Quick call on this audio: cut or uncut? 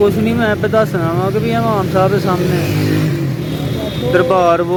uncut